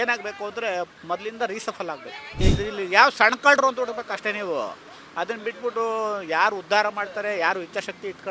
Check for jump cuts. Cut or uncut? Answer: cut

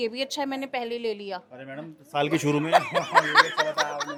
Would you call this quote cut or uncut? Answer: uncut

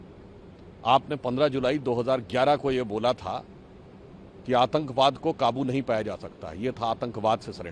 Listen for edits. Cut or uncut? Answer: uncut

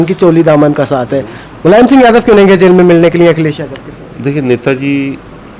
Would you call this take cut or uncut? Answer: uncut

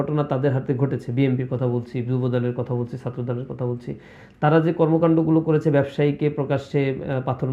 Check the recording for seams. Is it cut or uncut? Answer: uncut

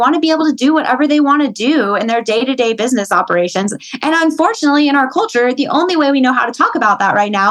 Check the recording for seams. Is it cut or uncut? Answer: uncut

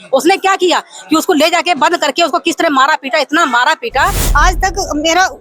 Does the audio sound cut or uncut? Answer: cut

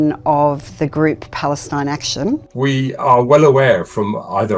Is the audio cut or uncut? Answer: cut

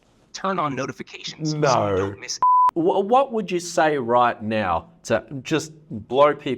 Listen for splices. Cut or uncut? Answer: cut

